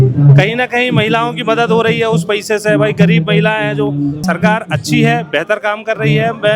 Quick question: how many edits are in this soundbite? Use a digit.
1